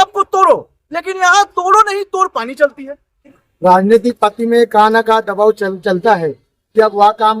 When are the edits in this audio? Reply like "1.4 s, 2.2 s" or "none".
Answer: 3.4 s